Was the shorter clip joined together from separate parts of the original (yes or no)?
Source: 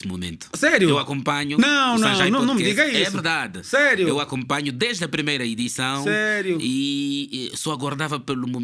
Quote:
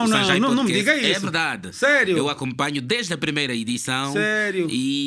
no